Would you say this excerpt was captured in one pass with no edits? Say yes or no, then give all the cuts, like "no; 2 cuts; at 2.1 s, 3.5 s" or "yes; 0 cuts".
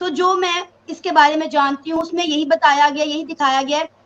no; 1 cut; at 2.0 s